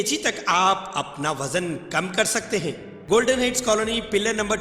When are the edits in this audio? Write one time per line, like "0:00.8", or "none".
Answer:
0:02.9